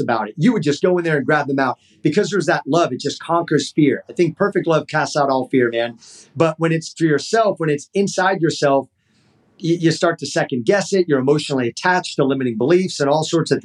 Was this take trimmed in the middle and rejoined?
no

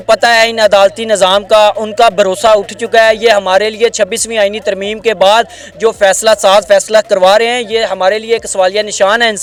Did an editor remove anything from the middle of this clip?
no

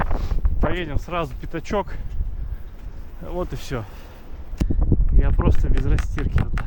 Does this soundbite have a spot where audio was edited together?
yes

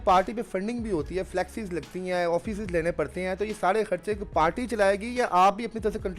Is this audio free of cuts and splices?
yes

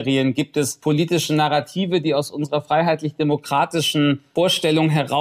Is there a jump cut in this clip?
no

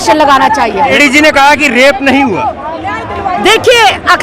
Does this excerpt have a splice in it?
yes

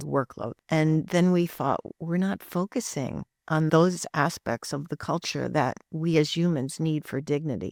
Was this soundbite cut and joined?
no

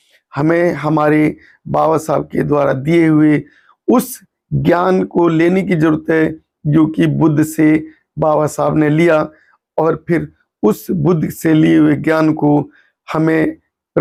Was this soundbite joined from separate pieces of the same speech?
no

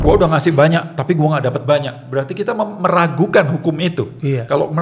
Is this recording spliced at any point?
no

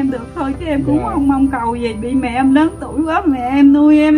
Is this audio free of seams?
yes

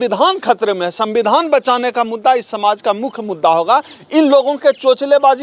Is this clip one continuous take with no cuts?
yes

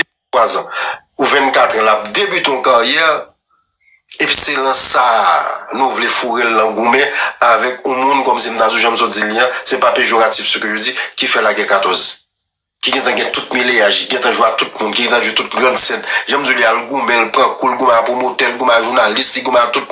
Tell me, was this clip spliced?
no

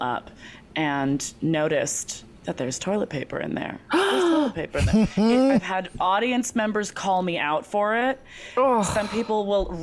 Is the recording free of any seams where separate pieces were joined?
yes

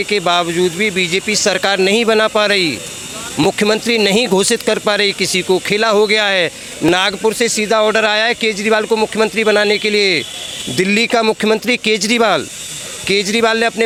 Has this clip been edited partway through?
no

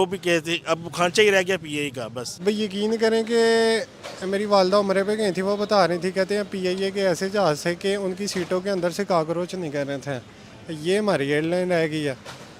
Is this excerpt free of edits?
no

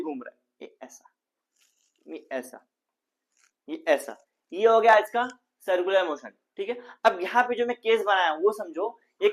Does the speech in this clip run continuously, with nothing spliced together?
yes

